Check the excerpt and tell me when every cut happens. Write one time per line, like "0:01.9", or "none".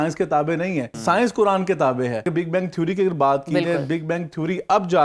0:00.9
0:02.3